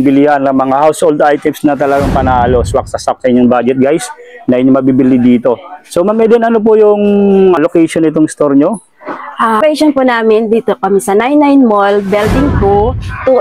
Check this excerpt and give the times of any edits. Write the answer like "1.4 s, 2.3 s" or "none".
7.6 s, 9.6 s